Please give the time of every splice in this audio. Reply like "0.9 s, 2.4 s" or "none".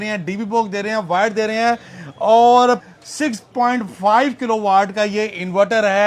2.8 s